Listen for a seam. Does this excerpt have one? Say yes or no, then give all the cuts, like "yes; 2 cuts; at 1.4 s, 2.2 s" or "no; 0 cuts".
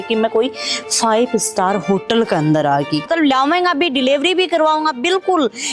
yes; 1 cut; at 3.1 s